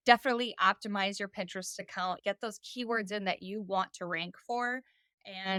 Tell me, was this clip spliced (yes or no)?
no